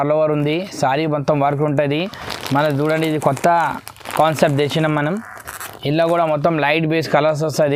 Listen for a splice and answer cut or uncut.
uncut